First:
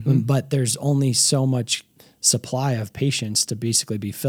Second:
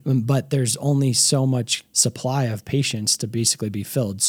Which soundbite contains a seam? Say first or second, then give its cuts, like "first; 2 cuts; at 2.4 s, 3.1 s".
second; 1 cut; at 1.8 s